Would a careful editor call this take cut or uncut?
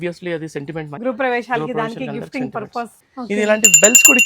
cut